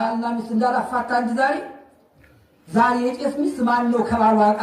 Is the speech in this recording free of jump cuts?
yes; 0 cuts

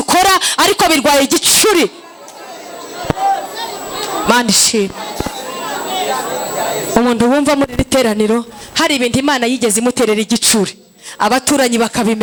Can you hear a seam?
no; 0 cuts

